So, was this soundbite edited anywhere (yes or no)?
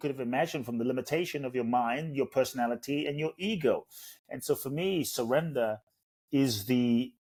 no